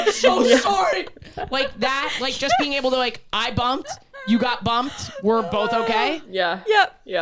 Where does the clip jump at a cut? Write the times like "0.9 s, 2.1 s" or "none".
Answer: none